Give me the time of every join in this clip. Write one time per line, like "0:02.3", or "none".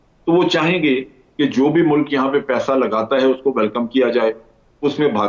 none